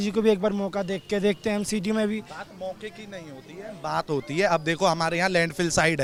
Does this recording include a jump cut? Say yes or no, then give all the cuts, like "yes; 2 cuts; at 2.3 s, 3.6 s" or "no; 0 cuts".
no; 0 cuts